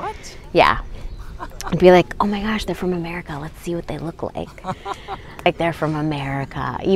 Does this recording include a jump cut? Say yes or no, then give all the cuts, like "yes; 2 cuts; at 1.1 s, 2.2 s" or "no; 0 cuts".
yes; 1 cut; at 5.5 s